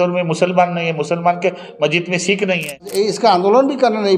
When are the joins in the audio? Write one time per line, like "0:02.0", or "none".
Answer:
0:02.9